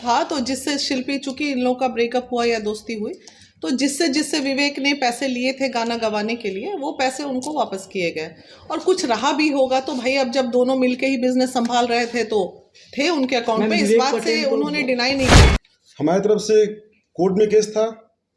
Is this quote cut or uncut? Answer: cut